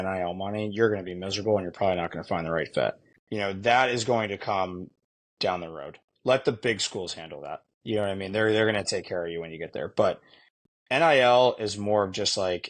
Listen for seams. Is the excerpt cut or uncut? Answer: cut